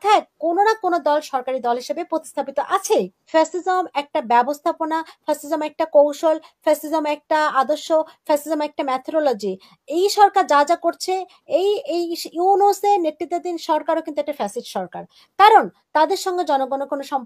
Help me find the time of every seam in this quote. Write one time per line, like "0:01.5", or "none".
0:03.2